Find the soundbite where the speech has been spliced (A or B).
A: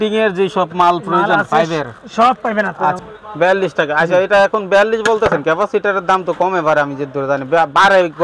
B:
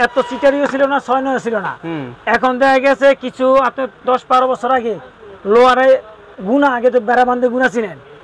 A